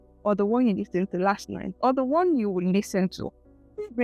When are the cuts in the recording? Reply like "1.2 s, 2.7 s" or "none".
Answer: none